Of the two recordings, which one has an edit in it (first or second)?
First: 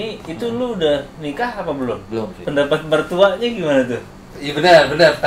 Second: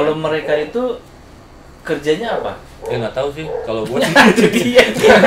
first